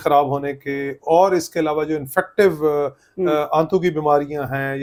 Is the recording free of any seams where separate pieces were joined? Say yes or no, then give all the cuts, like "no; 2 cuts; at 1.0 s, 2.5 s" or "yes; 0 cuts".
yes; 0 cuts